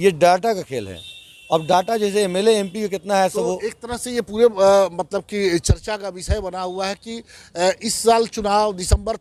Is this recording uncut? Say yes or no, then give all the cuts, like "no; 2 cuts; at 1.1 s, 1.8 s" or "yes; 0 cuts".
yes; 0 cuts